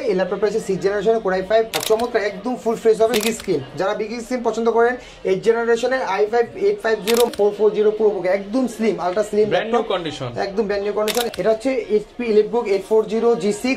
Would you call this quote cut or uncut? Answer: cut